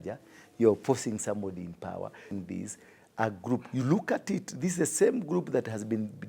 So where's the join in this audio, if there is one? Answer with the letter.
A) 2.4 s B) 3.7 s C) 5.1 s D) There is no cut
A